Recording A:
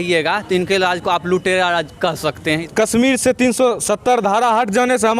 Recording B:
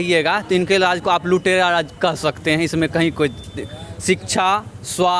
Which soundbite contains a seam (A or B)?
A